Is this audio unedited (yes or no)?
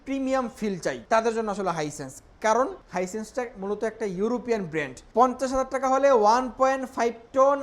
no